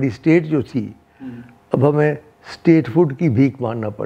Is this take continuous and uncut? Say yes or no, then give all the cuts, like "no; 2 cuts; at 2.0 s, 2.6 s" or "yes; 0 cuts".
yes; 0 cuts